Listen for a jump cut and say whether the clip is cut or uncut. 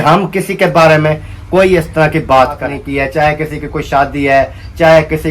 cut